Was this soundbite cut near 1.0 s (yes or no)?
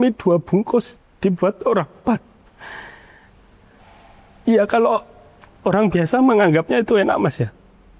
yes